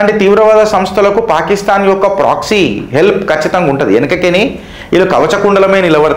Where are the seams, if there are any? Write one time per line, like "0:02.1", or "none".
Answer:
none